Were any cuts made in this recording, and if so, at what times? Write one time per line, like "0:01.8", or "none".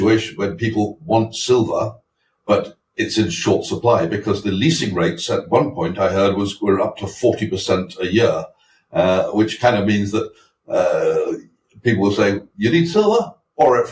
none